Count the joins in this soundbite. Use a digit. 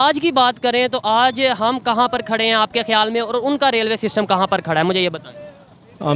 0